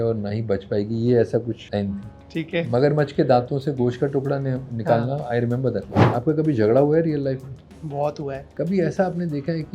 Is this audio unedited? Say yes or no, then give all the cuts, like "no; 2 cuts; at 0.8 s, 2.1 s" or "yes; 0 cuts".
no; 3 cuts; at 1.6 s, 6.0 s, 8.5 s